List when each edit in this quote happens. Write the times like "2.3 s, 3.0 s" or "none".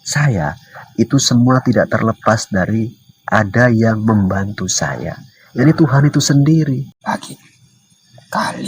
6.9 s